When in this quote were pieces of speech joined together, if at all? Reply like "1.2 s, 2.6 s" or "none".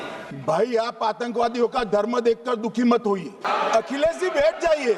3.4 s